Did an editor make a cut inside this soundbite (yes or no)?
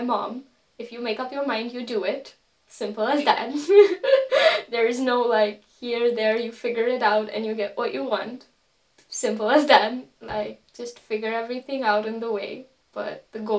no